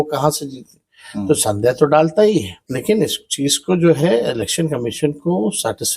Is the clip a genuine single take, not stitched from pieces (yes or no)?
no